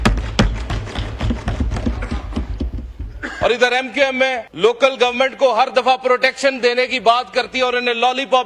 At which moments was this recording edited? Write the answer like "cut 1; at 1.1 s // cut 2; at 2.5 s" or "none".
cut 1; at 4.5 s